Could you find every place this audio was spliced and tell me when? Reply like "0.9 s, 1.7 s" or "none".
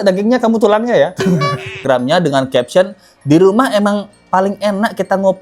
1.8 s